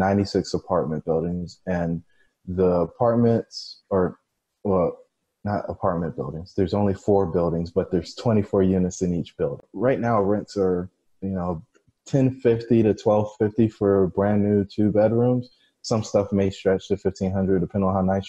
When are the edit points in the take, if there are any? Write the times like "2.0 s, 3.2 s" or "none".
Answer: 9.7 s